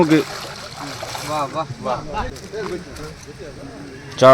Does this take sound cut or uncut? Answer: cut